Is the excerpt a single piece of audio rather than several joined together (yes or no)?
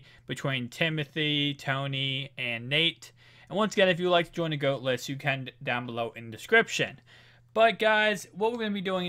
no